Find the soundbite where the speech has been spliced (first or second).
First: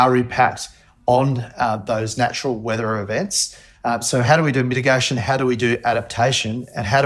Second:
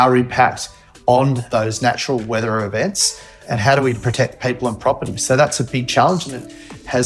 second